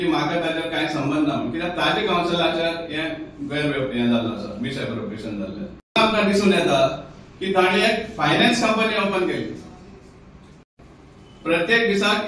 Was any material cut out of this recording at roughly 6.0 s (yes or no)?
yes